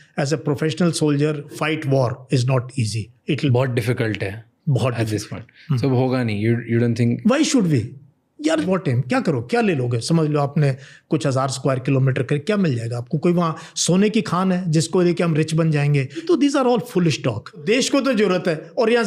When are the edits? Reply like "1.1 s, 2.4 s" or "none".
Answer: 1.5 s, 3.5 s, 8.7 s, 16.2 s, 17.6 s